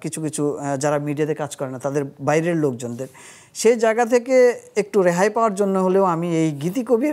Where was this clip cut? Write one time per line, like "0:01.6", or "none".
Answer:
none